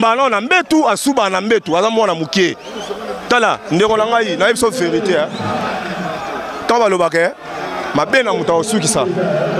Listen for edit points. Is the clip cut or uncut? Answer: uncut